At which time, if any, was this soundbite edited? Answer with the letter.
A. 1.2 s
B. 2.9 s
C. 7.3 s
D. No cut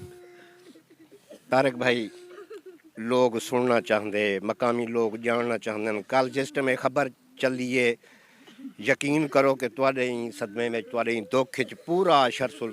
A